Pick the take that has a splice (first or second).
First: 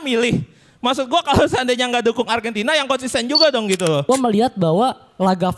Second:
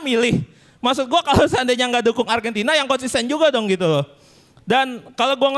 first